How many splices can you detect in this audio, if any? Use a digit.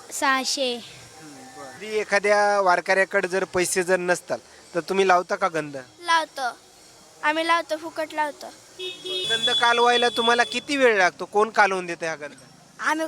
2